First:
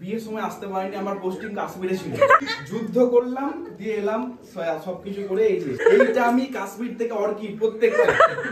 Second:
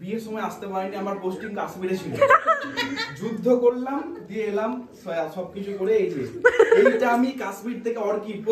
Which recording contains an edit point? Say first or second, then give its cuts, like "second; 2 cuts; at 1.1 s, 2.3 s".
first; 2 cuts; at 2.4 s, 5.8 s